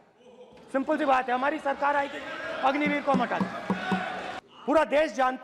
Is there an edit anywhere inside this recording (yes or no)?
yes